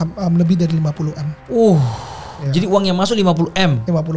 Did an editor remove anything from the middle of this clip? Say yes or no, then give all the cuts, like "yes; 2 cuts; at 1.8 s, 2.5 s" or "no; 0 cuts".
no; 0 cuts